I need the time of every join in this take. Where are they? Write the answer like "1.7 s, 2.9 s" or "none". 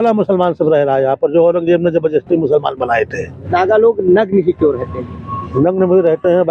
3.4 s